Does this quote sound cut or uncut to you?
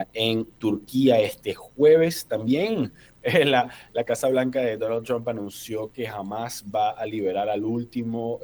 uncut